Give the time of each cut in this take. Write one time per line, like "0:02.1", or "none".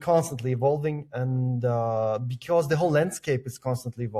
none